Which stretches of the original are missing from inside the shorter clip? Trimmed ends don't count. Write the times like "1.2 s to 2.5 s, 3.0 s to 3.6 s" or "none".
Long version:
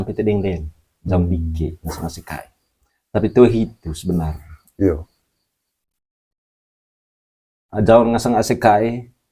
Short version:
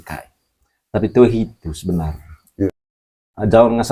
4.9 s to 7.0 s